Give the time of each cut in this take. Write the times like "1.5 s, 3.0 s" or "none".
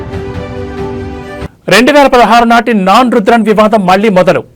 1.4 s